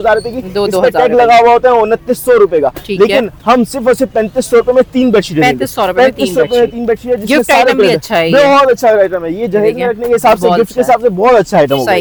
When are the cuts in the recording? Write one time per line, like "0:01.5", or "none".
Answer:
none